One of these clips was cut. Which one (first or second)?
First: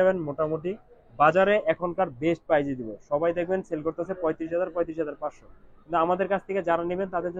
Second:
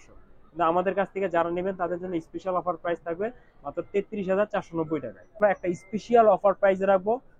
second